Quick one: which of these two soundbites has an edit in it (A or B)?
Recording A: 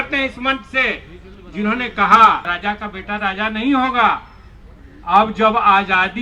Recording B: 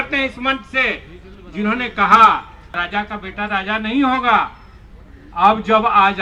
A